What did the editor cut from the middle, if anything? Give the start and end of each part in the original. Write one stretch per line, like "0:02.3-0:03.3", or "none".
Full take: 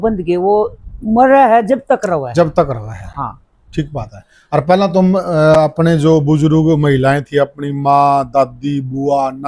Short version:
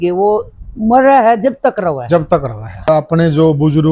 0:03.1-0:05.5